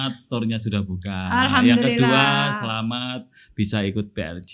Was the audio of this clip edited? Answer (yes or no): no